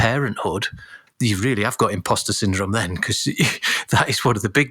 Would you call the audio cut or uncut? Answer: cut